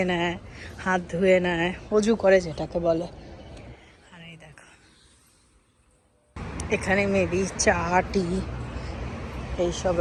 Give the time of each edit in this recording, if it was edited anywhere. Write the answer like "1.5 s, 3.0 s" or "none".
none

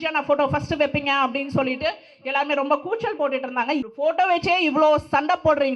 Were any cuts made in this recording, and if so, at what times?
3.8 s

